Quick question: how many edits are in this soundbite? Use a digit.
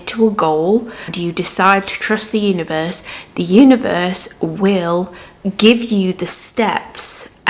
1